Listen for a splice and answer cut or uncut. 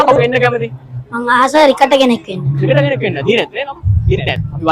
uncut